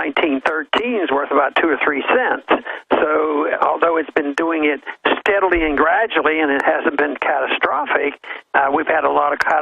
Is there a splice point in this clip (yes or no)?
yes